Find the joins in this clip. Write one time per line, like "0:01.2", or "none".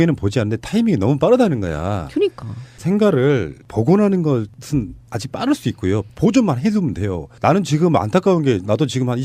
0:06.3